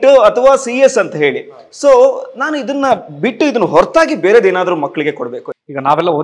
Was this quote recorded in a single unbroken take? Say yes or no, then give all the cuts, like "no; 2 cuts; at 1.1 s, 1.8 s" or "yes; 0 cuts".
no; 1 cut; at 5.3 s